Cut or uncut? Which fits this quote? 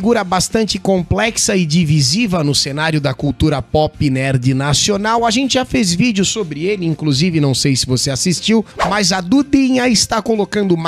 uncut